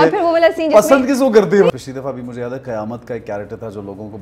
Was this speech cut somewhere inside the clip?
yes; 1 cut; at 1.7 s

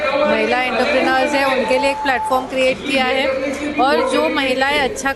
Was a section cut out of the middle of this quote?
no; 0 cuts

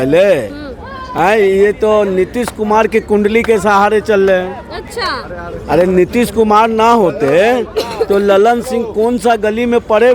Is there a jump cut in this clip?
no; 0 cuts

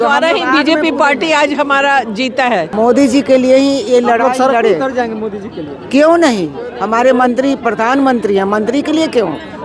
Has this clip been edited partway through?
yes; 1 cut; at 2.7 s

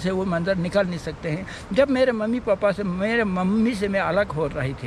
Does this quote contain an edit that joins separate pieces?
no; 0 cuts

